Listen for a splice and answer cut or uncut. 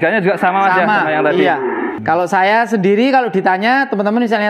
cut